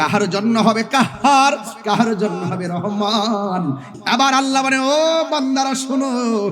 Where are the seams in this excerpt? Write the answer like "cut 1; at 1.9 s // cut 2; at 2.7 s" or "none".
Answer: cut 1; at 3.9 s

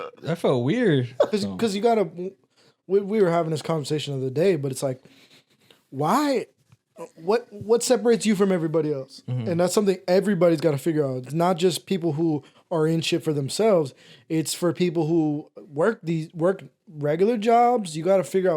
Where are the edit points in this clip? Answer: cut 1; at 1.3 s

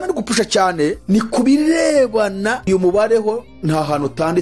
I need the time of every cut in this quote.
cut 1; at 1.0 s // cut 2; at 2.7 s

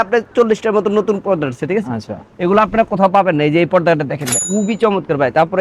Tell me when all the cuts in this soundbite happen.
cut 1; at 4.3 s

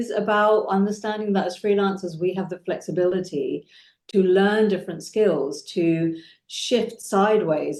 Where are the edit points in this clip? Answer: none

